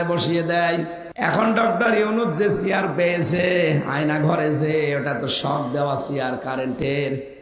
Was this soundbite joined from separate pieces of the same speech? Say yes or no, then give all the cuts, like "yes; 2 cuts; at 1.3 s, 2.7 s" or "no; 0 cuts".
yes; 1 cut; at 1.0 s